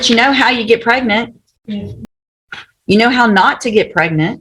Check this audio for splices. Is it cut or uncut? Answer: cut